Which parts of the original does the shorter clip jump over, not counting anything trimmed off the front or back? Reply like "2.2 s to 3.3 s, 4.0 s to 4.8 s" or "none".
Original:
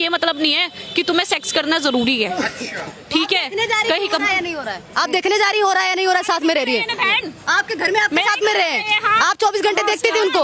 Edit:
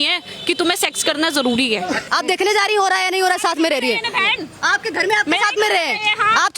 2.5 s to 4.9 s